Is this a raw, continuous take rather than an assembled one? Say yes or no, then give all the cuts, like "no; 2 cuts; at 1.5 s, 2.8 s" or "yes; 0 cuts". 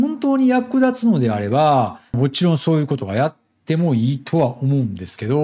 yes; 0 cuts